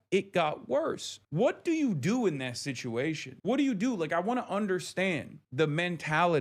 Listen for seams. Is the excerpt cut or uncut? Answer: cut